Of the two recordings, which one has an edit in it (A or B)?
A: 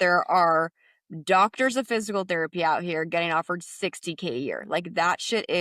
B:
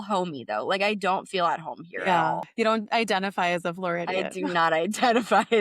B